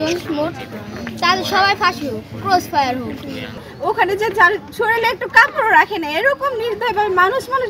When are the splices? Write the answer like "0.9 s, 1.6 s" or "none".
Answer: 3.6 s